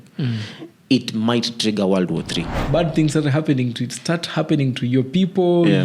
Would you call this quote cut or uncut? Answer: cut